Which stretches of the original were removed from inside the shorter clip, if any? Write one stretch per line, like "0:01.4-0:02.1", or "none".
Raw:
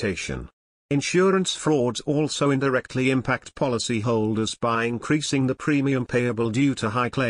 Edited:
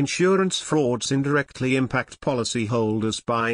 0:02.1-0:02.5